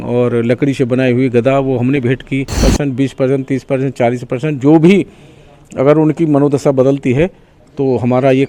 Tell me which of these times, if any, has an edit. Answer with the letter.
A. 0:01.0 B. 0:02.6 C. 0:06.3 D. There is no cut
B